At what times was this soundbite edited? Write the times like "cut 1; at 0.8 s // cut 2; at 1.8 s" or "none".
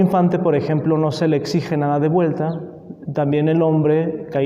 none